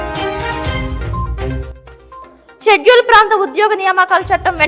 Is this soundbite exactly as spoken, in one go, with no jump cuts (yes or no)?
no